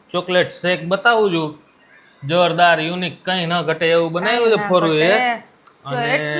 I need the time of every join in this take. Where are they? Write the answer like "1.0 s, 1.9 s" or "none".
none